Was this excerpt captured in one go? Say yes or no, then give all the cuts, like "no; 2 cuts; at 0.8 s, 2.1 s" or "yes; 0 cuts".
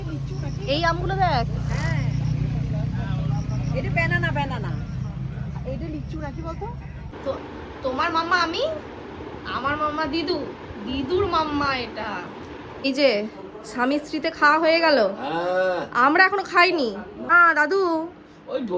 no; 3 cuts; at 7.2 s, 12.8 s, 17.3 s